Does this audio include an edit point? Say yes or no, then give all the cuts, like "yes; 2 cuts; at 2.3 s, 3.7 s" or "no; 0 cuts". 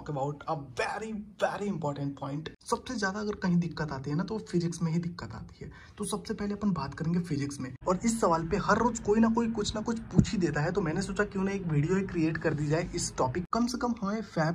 yes; 3 cuts; at 2.5 s, 7.7 s, 13.4 s